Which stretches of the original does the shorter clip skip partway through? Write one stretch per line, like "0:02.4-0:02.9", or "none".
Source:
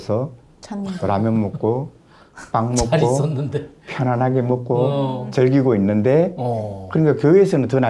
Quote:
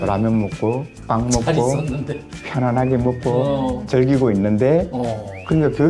0:01.9-0:02.4